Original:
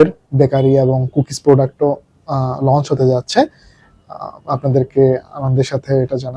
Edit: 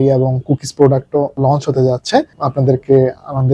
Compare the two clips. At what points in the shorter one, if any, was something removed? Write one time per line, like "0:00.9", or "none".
0:01.3
0:02.3